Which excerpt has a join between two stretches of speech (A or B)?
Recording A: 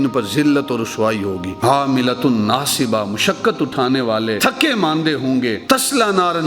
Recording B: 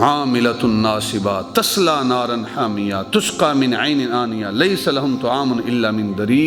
A